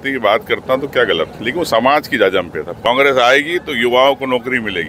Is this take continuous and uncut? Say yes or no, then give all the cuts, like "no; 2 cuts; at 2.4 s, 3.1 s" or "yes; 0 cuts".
no; 1 cut; at 2.9 s